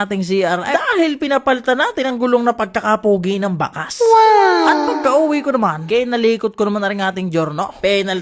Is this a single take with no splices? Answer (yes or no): yes